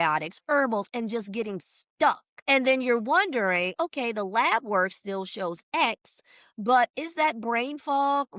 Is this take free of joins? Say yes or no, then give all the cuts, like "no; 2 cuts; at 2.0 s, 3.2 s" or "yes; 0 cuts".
no; 1 cut; at 2.3 s